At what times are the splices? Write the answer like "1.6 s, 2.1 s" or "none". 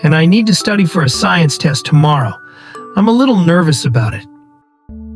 4.1 s